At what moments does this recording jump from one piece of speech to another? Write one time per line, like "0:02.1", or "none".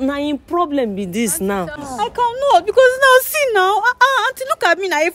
0:01.8